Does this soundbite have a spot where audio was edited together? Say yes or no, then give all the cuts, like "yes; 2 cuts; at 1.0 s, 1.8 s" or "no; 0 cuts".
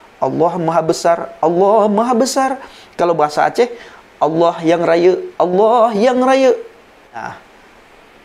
yes; 1 cut; at 7.1 s